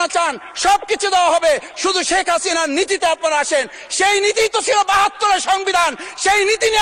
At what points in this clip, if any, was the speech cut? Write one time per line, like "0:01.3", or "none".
none